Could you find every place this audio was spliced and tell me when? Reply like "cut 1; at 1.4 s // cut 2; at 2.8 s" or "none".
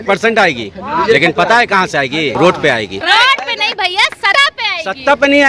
cut 1; at 2.3 s // cut 2; at 3.0 s // cut 3; at 4.3 s